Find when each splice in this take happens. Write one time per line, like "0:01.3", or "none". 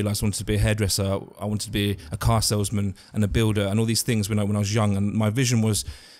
none